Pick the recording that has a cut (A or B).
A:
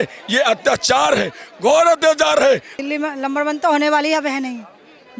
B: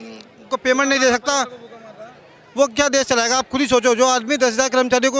A